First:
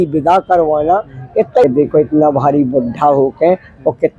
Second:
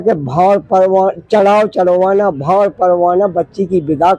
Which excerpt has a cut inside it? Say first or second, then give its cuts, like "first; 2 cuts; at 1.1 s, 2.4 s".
first; 1 cut; at 1.6 s